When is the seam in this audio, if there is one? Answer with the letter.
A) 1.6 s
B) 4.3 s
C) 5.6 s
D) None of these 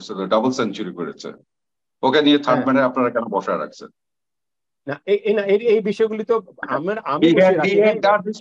D